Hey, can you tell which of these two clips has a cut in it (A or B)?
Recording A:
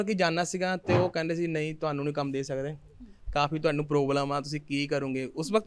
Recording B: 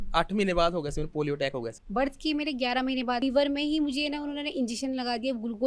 B